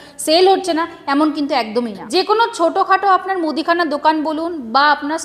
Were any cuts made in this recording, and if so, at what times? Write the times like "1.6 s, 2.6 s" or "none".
2.0 s